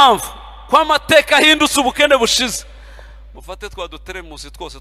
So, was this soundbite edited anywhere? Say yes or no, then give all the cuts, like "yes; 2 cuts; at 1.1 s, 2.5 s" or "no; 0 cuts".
no; 0 cuts